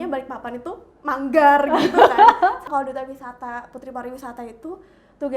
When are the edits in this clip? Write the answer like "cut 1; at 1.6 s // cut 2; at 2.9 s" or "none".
cut 1; at 2.6 s